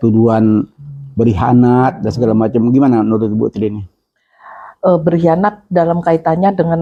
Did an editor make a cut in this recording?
no; 0 cuts

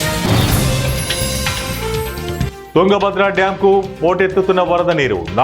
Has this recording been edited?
yes; 1 cut; at 2.6 s

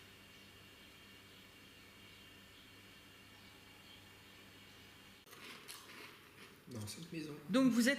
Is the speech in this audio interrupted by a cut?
yes; 1 cut; at 5.2 s

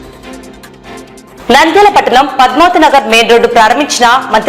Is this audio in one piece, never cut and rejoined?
no; 1 cut; at 0.9 s

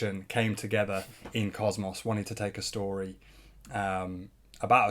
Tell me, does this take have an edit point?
no; 0 cuts

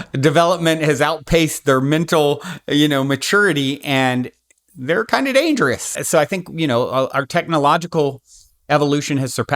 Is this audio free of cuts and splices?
no; 1 cut; at 5.9 s

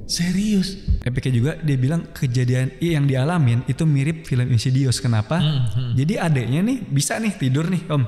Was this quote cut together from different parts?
yes; 1 cut; at 0.9 s

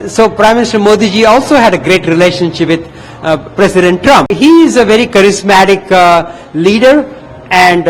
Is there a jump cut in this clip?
yes; 1 cut; at 4.3 s

